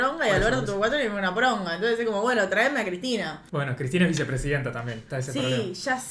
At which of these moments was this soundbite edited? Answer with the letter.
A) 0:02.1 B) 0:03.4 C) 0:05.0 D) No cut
B